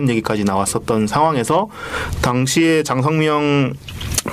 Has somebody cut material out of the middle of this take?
no; 0 cuts

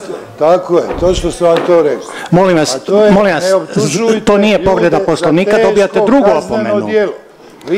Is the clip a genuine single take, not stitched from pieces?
yes; 0 cuts

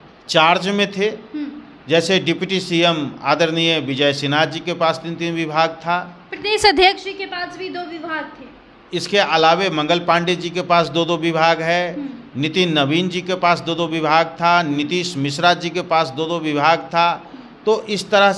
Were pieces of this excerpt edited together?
no; 0 cuts

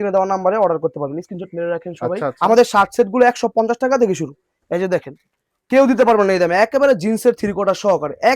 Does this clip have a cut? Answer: yes; 1 cut; at 2.3 s

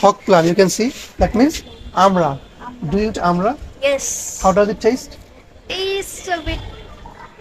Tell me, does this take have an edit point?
no; 0 cuts

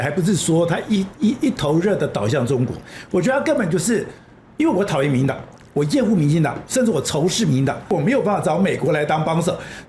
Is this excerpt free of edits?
no; 1 cut; at 7.9 s

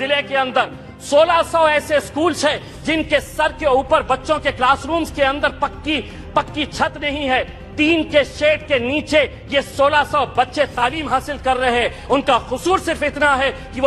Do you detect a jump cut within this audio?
no; 0 cuts

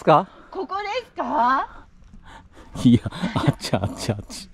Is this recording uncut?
yes; 0 cuts

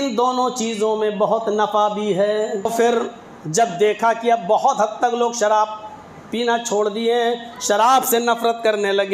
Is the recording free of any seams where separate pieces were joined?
no; 1 cut; at 2.7 s

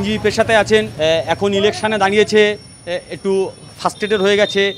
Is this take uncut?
no; 1 cut; at 0.9 s

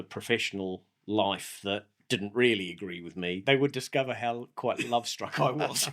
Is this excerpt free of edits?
no; 1 cut; at 3.4 s

